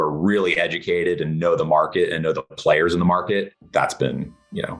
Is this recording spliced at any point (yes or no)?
yes